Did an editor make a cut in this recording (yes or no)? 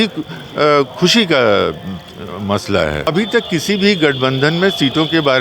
yes